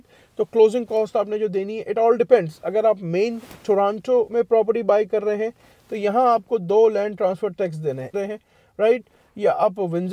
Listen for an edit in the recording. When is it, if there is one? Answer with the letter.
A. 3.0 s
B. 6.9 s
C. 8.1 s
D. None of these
C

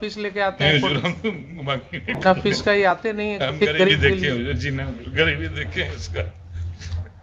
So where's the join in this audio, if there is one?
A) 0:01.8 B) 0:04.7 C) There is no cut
C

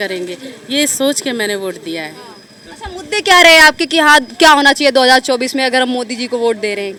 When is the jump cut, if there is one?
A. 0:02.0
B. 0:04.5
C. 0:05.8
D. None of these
D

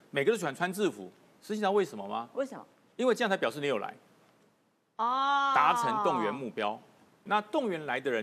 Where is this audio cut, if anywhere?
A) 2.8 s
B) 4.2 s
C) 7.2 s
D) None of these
C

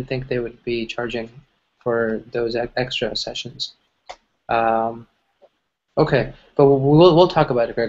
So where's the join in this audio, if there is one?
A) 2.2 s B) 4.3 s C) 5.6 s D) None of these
D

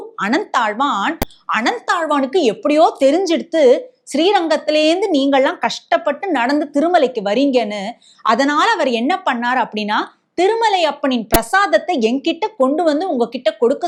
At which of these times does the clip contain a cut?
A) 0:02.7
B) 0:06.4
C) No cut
C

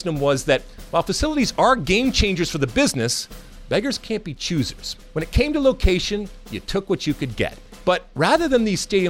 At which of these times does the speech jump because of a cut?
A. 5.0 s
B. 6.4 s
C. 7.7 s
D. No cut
C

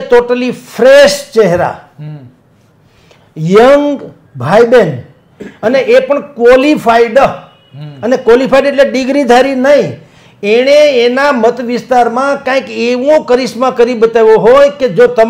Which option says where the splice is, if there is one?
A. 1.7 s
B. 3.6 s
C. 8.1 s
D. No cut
D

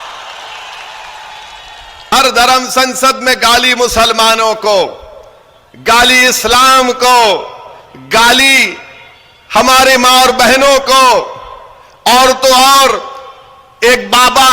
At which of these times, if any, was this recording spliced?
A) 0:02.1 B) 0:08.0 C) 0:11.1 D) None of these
A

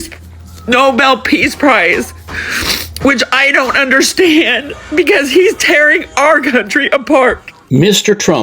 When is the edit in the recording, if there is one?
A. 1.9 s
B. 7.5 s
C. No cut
B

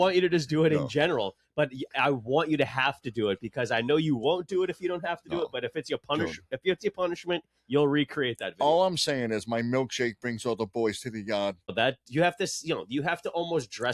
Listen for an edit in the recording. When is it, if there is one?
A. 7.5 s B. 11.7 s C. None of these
B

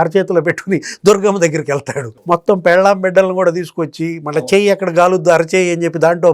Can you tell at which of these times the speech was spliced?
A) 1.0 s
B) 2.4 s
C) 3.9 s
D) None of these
D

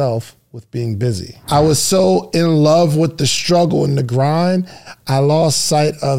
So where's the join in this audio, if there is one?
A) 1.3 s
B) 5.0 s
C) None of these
A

